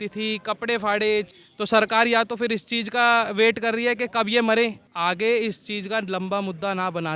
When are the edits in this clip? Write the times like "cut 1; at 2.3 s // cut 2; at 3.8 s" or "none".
cut 1; at 1.3 s // cut 2; at 4.9 s